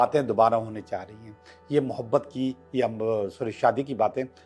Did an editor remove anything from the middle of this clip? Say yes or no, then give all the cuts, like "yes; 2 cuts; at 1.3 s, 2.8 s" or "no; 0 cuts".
no; 0 cuts